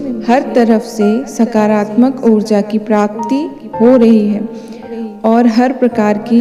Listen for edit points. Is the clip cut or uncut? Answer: uncut